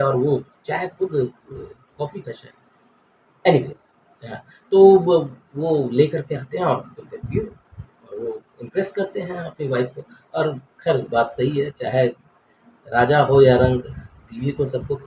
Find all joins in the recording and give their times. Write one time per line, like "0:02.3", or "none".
none